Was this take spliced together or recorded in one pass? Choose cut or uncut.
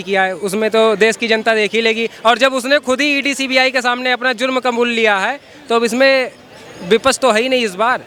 uncut